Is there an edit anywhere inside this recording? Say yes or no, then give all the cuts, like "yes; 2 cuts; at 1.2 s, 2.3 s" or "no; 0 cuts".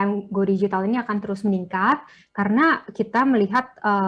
no; 0 cuts